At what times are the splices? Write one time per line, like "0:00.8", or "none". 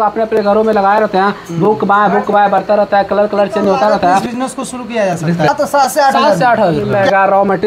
0:04.2
0:05.5
0:06.8

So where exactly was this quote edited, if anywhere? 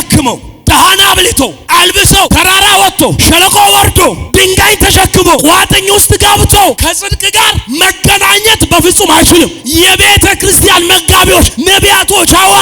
0:02.3
0:06.8
0:09.6

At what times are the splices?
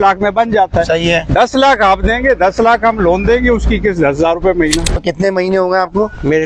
0:05.0

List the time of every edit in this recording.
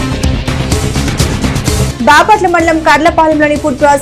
0:01.8

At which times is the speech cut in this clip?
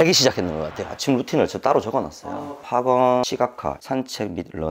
0:00.9
0:03.6

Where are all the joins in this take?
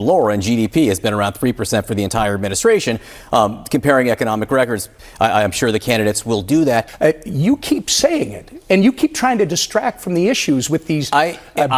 0:06.9

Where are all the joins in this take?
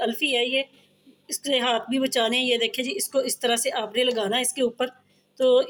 none

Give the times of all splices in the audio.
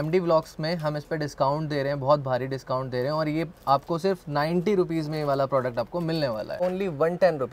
0:06.6

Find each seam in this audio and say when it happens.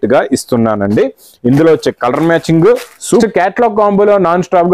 0:03.2

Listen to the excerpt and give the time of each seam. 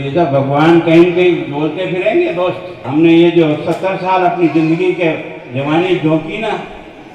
0:02.8

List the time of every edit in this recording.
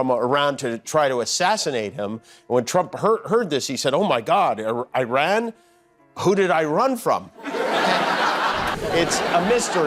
0:08.7

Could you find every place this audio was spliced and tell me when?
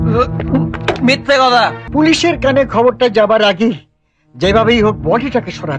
0:01.8

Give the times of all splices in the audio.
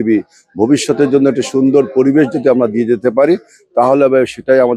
none

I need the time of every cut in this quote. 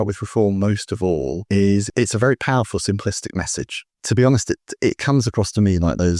0:03.9

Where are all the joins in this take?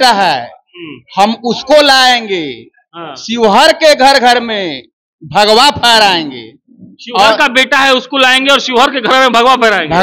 none

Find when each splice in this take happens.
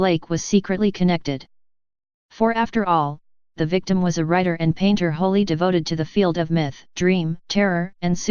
0:01.1

